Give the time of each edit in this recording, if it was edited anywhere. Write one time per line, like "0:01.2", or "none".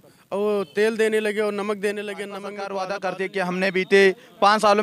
0:02.6